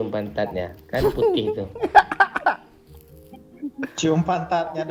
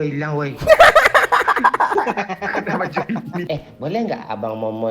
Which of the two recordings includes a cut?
second; 1 cut; at 3.4 s

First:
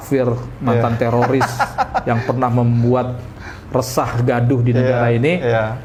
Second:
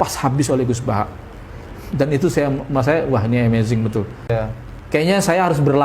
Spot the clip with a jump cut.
second; 1 cut; at 4.3 s

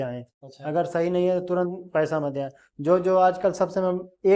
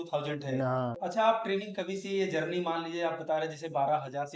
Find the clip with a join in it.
second; 1 cut; at 1.0 s

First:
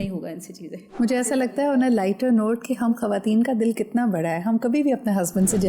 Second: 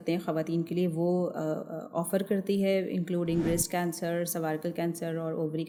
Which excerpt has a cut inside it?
first; 1 cut; at 0.9 s

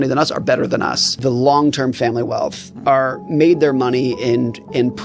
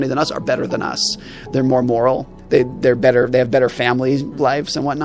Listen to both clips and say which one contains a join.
first; 1 cut; at 1.1 s

